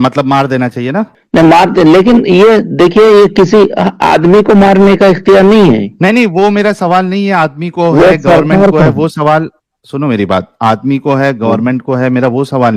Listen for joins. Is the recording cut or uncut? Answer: uncut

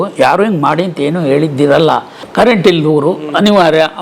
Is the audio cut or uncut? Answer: cut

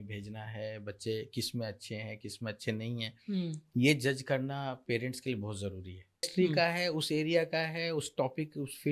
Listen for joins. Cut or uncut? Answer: cut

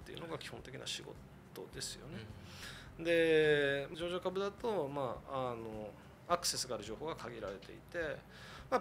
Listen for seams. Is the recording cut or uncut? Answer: uncut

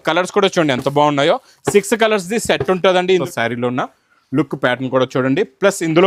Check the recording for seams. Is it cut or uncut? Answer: cut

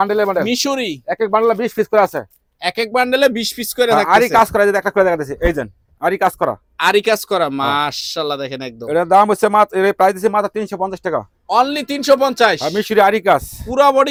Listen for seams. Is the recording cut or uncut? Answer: uncut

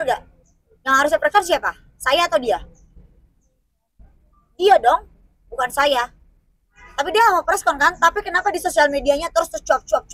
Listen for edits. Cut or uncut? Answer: uncut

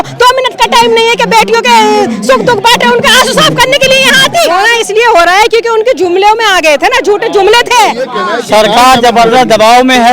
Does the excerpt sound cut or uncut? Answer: cut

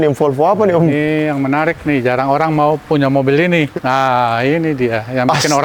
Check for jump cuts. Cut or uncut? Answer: cut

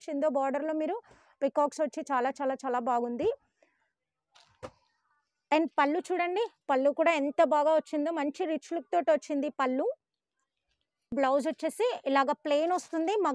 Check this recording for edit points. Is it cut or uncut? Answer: uncut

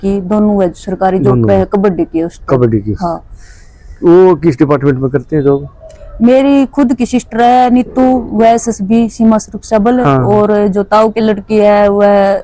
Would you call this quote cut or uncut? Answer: uncut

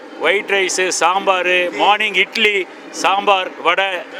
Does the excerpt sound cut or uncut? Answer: uncut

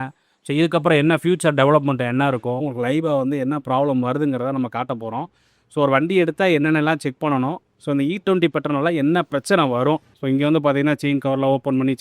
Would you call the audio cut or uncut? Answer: cut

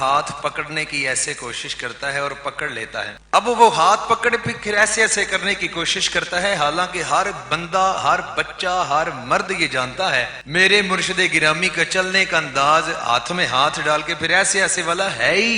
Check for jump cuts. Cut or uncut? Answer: cut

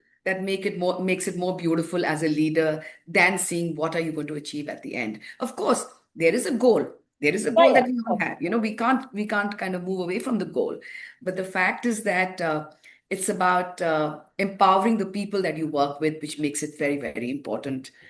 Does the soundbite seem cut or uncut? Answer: uncut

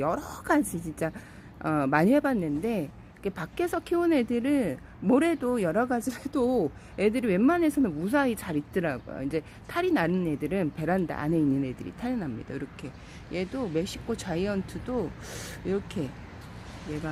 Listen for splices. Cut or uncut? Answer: uncut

